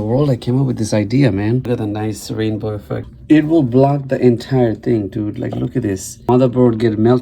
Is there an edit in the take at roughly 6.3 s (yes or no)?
yes